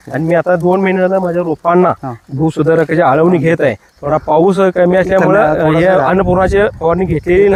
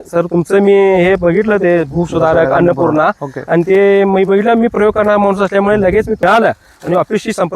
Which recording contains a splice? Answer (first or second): second